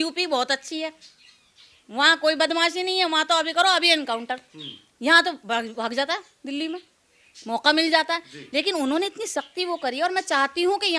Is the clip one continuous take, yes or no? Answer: yes